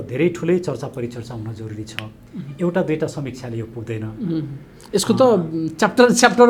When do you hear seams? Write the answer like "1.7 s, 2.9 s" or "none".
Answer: none